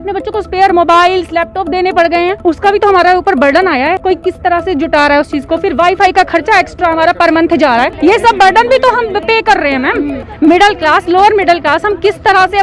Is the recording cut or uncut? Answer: cut